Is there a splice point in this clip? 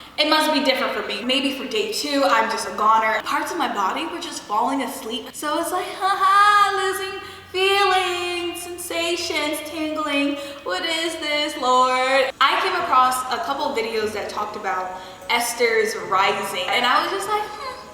yes; 4 cuts; at 3.2 s, 5.3 s, 12.3 s, 16.7 s

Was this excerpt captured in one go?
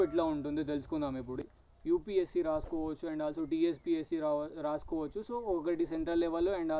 no; 1 cut; at 1.4 s

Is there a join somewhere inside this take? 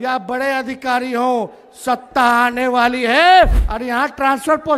yes; 1 cut; at 3.7 s

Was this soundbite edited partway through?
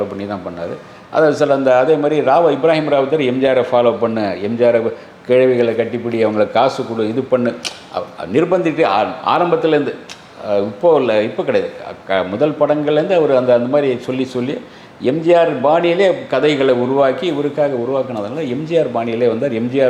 no; 0 cuts

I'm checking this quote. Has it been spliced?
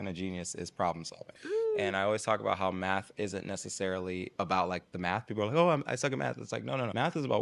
no; 0 cuts

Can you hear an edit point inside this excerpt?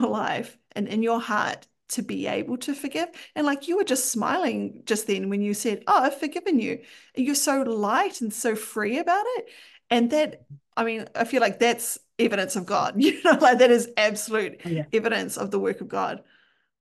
no; 0 cuts

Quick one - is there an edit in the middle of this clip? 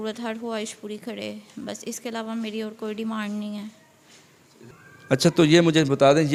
no; 0 cuts

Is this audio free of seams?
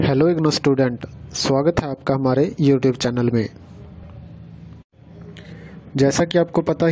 no; 1 cut; at 4.0 s

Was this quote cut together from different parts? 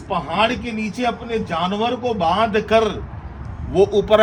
no; 0 cuts

